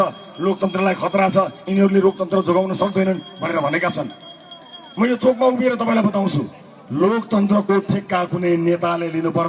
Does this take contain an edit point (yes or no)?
no